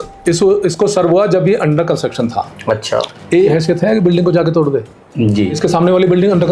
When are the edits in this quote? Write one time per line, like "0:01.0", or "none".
0:03.5
0:05.6